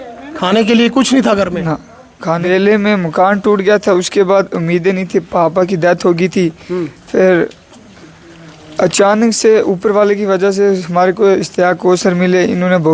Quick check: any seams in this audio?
yes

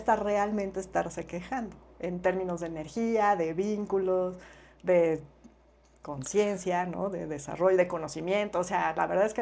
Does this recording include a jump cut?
no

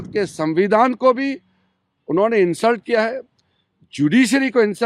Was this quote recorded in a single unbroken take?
yes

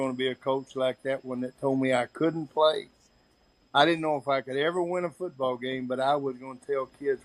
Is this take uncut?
yes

